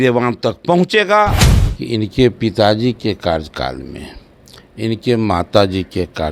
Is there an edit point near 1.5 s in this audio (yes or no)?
yes